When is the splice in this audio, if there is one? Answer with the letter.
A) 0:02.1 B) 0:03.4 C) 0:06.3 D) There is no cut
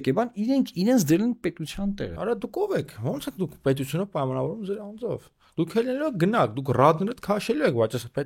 A